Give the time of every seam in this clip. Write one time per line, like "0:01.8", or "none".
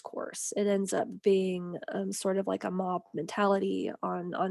none